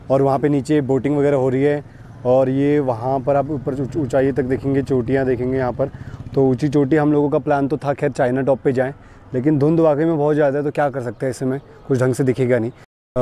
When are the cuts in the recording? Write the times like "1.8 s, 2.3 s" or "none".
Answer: none